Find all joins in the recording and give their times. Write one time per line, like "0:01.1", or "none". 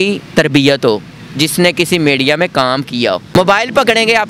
0:03.2